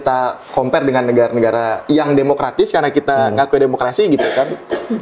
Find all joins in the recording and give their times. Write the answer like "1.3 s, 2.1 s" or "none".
none